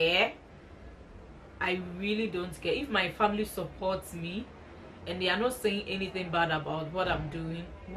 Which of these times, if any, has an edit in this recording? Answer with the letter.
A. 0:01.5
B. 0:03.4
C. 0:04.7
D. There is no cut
D